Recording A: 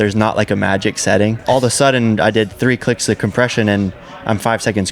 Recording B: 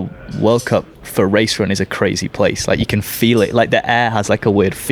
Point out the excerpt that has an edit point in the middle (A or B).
A